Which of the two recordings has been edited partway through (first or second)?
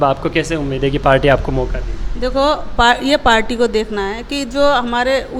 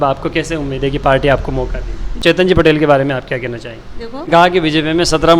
second